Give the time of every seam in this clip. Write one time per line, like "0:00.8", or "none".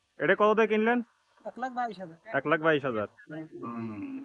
none